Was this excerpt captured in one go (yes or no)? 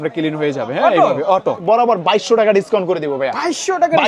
no